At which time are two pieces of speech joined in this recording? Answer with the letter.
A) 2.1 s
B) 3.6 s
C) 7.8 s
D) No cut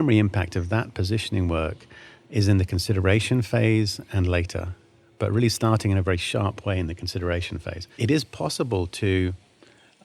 C